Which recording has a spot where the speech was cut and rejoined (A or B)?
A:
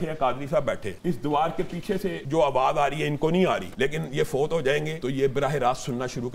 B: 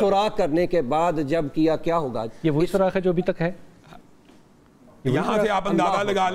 A